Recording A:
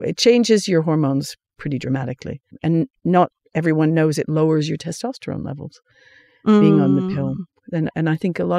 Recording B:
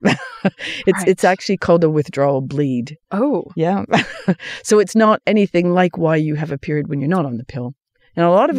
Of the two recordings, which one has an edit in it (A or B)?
A